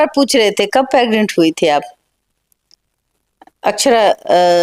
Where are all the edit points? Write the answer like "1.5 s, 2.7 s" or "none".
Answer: none